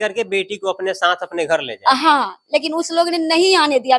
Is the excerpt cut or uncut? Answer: uncut